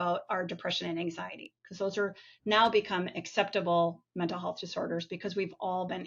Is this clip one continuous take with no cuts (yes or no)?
yes